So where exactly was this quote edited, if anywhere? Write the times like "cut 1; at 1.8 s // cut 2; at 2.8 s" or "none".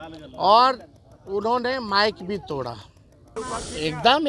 cut 1; at 3.3 s